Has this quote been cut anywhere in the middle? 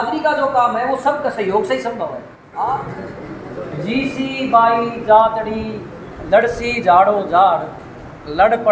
yes; 1 cut; at 2.6 s

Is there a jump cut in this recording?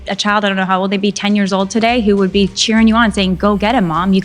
no; 0 cuts

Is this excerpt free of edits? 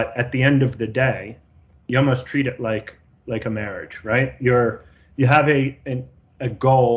yes; 0 cuts

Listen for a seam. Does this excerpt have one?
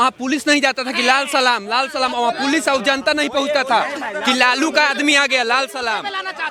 no; 0 cuts

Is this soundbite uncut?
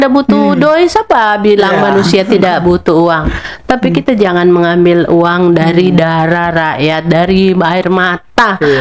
yes; 0 cuts

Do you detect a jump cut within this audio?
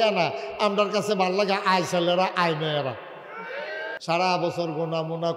yes; 1 cut; at 3.9 s

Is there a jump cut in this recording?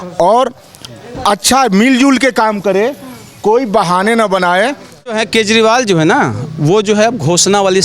yes; 1 cut; at 5.2 s

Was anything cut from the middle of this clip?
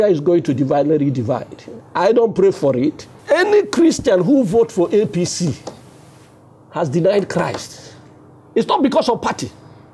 yes; 1 cut; at 3.1 s

